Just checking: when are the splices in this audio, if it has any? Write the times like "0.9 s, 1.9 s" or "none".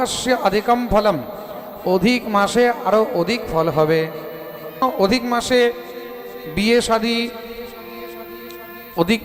4.8 s